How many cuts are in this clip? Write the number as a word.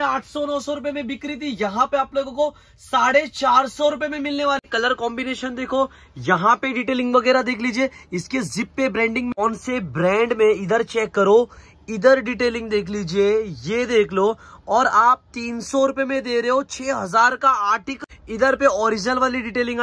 three